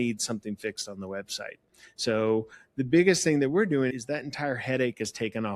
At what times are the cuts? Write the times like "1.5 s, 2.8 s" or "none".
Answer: none